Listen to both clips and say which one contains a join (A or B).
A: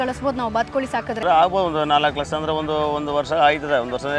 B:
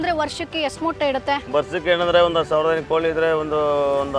A